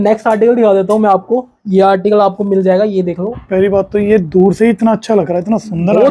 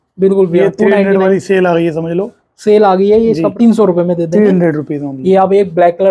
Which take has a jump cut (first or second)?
second